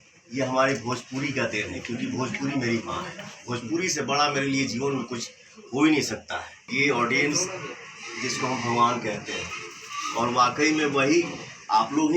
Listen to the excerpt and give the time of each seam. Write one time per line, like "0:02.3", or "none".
0:06.7